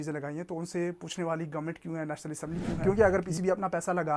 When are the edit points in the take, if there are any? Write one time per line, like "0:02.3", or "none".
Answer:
0:02.7